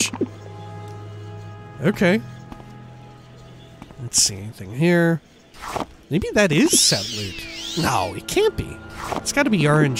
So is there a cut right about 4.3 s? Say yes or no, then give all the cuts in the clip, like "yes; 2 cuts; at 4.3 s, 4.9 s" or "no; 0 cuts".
yes; 1 cut; at 4.3 s